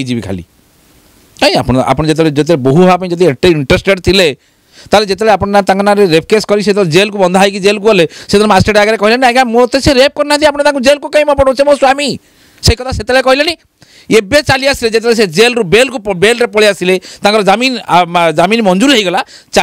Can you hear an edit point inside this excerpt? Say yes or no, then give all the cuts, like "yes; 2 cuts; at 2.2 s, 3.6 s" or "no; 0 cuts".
no; 0 cuts